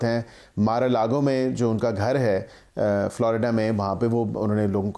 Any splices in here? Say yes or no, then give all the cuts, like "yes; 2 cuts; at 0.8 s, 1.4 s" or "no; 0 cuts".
no; 0 cuts